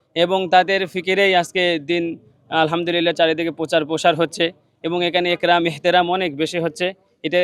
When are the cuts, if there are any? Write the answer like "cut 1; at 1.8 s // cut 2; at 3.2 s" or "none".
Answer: none